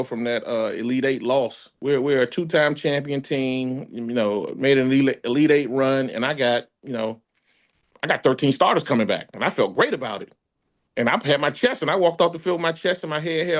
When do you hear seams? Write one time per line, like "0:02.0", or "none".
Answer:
0:01.7